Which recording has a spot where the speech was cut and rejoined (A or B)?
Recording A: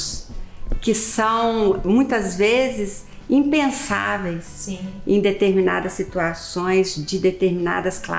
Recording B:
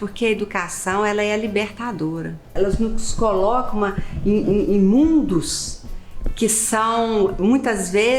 B